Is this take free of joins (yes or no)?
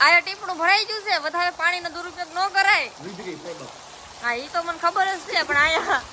yes